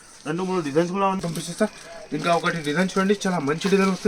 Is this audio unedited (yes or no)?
no